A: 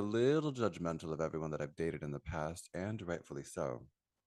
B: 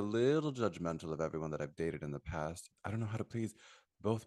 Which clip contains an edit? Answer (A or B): B